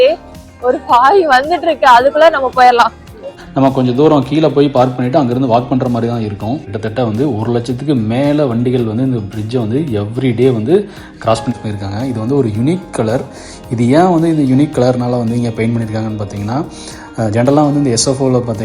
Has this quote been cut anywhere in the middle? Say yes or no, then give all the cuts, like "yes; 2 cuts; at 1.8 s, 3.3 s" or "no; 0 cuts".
yes; 3 cuts; at 3.3 s, 6.7 s, 11.6 s